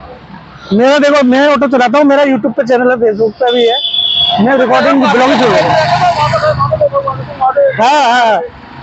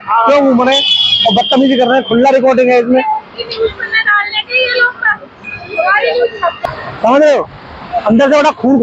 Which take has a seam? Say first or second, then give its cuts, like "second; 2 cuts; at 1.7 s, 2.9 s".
second; 1 cut; at 6.6 s